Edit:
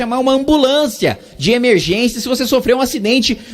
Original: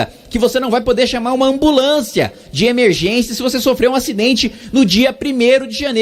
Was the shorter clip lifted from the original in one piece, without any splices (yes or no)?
yes